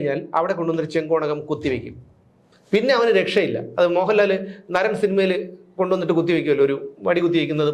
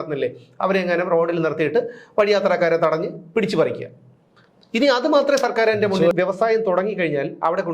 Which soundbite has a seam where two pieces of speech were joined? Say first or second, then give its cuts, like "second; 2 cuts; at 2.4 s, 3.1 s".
second; 1 cut; at 6.1 s